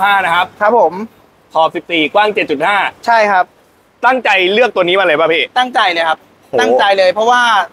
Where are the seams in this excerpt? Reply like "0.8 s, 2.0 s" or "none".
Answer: none

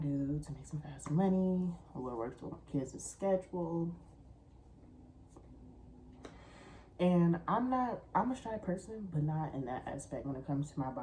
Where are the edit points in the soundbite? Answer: none

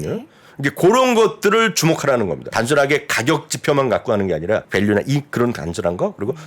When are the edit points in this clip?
2.5 s, 4.7 s

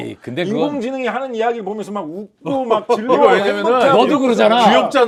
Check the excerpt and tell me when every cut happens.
none

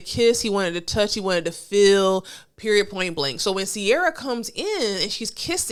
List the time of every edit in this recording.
none

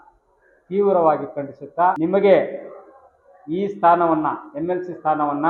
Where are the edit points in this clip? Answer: 2.0 s

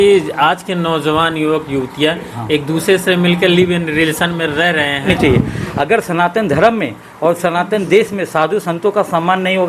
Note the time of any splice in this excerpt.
5.1 s

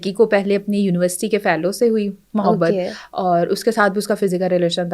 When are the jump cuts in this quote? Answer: none

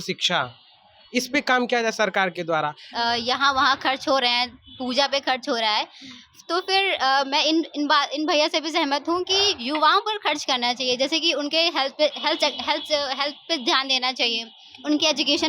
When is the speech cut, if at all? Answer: 2.9 s

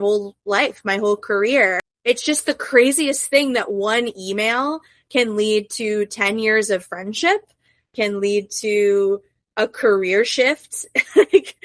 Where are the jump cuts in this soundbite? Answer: 1.9 s

